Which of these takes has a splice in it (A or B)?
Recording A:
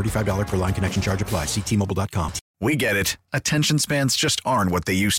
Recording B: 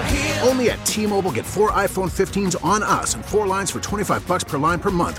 A